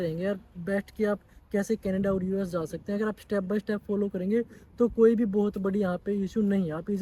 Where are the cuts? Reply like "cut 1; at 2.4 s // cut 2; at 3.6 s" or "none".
none